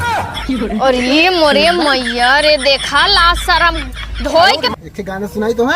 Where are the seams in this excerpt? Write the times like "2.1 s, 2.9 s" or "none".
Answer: 4.7 s

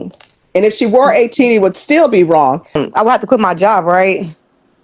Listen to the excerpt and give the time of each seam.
2.8 s

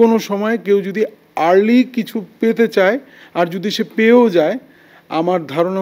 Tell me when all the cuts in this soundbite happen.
none

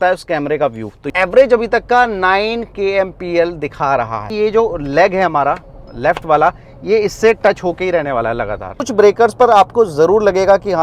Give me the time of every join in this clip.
1.1 s, 4.3 s, 8.7 s

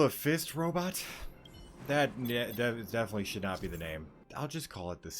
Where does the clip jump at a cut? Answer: 4.2 s

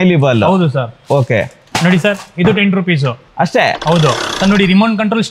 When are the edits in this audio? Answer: 4.2 s

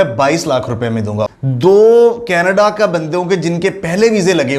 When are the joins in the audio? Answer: 1.3 s

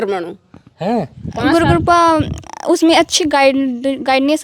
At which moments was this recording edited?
1.2 s

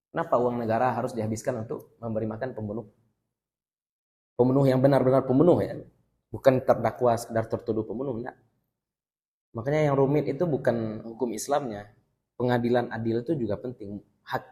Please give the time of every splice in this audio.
none

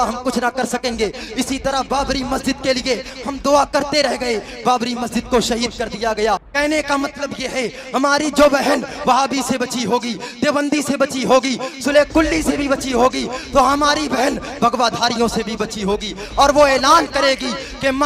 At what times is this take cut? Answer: 6.5 s

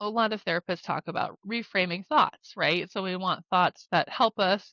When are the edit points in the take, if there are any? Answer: 1.3 s

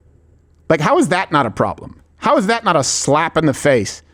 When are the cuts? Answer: none

